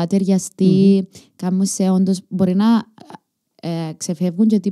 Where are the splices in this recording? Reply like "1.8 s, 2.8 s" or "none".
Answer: none